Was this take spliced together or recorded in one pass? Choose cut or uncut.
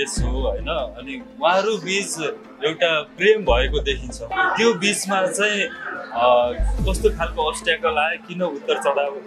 cut